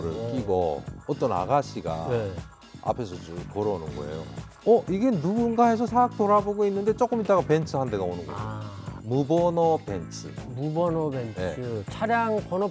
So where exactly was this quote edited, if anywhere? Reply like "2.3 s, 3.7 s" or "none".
4.3 s